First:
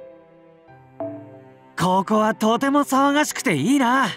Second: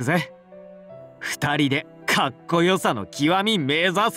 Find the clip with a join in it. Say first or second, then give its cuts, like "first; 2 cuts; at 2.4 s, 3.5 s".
first; 1 cut; at 1.0 s